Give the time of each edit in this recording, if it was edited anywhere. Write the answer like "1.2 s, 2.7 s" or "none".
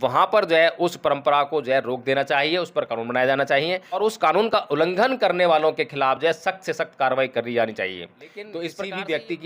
4.0 s, 8.5 s